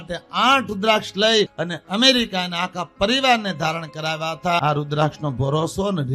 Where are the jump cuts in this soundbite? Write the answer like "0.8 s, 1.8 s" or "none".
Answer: 1.6 s, 4.6 s